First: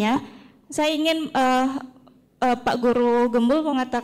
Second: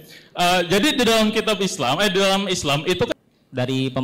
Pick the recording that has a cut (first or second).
second